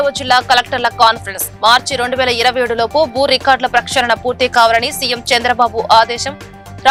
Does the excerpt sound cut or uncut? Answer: uncut